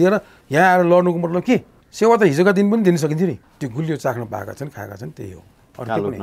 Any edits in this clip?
yes; 2 cuts; at 1.8 s, 3.5 s

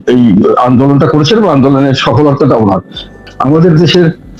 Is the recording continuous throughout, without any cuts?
no; 1 cut; at 3.2 s

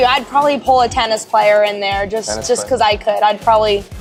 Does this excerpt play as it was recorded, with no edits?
yes; 0 cuts

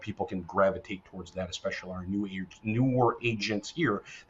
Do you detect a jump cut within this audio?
no; 0 cuts

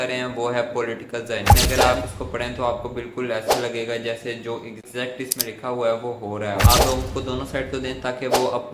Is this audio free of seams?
no; 2 cuts; at 1.6 s, 6.6 s

